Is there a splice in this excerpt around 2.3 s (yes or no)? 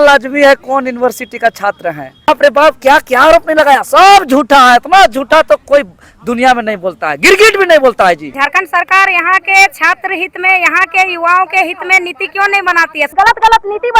yes